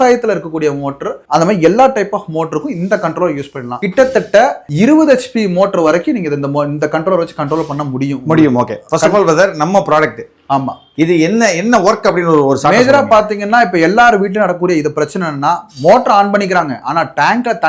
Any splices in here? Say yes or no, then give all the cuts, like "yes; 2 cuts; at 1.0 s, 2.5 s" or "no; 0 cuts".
no; 0 cuts